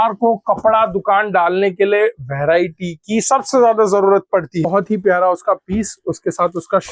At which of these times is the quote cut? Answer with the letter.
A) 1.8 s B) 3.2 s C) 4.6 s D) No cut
C